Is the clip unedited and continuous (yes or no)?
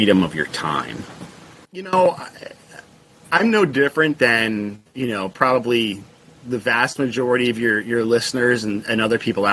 no